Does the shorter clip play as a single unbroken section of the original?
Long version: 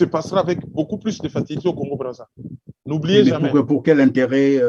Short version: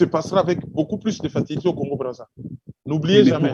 yes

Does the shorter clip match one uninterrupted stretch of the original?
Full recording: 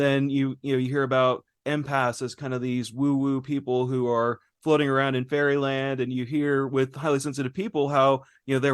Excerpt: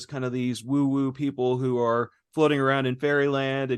yes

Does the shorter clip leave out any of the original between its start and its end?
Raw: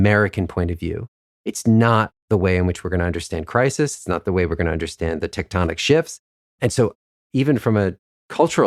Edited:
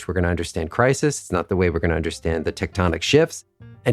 no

